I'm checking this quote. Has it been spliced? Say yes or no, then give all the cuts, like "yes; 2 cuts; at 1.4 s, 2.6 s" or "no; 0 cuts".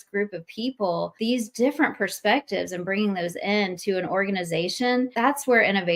yes; 2 cuts; at 1.1 s, 5.1 s